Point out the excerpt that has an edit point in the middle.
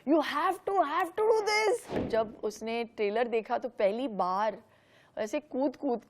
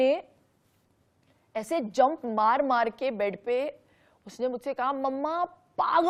first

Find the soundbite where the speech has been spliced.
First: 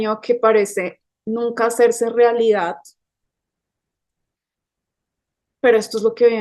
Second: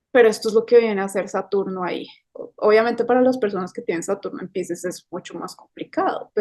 second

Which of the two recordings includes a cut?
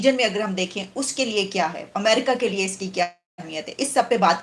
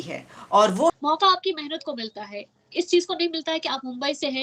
second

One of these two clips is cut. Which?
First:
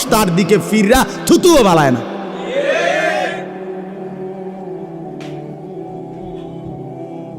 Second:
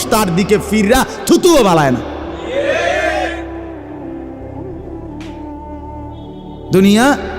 second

